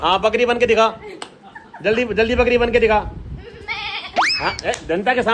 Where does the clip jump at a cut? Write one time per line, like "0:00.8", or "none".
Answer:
none

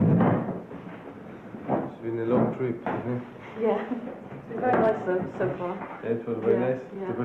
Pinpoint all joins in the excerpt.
none

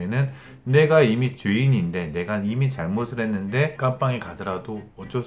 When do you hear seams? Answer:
none

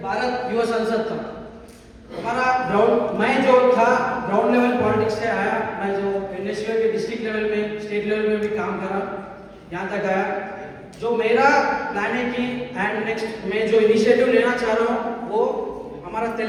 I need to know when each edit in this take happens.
none

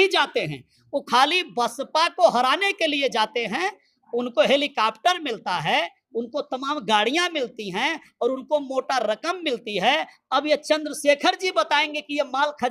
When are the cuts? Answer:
none

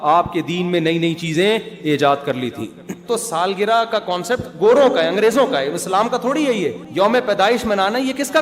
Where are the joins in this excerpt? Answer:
0:02.9
0:06.8

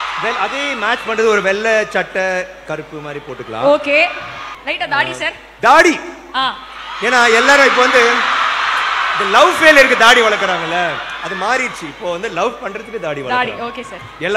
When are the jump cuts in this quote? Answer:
none

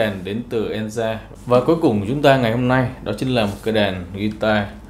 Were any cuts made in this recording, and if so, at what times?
0:01.3

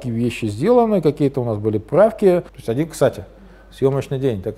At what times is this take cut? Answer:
0:02.6

